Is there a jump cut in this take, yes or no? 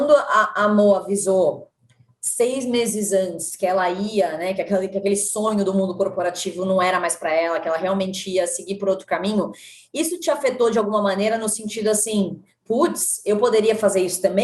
no